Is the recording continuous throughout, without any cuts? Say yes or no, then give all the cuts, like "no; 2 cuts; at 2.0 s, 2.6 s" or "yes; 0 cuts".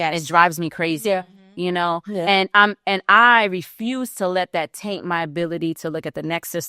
yes; 0 cuts